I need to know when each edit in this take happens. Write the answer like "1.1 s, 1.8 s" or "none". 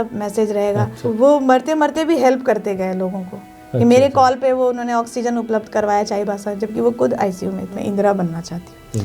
1.0 s, 7.7 s